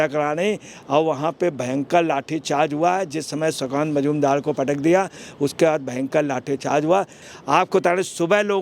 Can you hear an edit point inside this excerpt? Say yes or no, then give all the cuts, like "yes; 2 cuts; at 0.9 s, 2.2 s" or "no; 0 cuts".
yes; 1 cut; at 7.2 s